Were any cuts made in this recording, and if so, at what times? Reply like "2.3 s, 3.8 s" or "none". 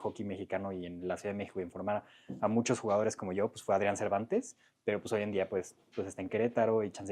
none